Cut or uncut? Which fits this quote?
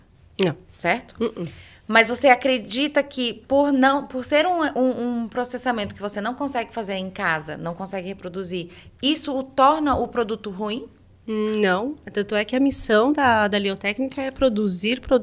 uncut